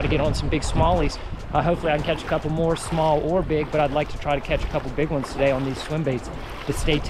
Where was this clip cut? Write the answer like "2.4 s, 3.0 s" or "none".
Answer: none